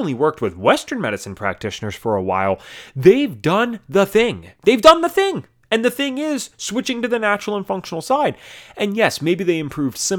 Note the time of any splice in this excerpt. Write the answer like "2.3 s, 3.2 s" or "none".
none